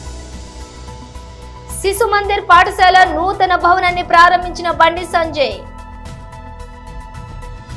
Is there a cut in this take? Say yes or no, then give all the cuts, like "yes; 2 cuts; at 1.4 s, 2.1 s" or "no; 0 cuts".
no; 0 cuts